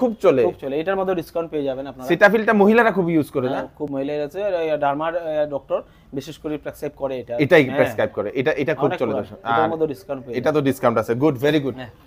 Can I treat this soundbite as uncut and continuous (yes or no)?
yes